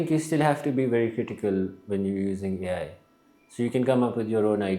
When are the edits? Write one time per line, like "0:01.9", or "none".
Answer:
none